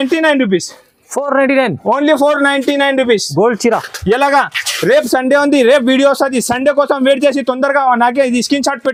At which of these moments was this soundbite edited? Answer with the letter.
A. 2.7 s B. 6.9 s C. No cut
C